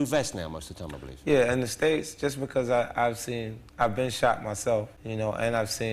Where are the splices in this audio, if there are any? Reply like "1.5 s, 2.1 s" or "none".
5.0 s

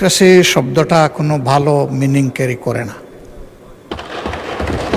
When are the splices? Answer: none

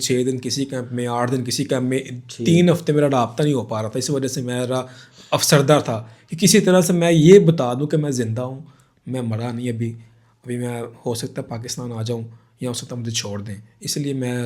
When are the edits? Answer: none

